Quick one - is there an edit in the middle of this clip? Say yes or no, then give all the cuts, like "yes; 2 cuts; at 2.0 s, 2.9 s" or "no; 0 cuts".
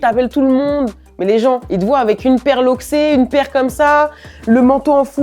no; 0 cuts